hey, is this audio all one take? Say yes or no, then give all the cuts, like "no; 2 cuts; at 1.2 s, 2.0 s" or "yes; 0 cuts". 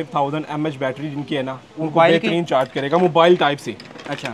yes; 0 cuts